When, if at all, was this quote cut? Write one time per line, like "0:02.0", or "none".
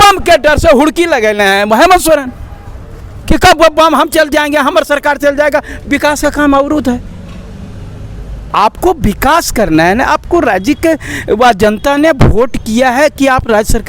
none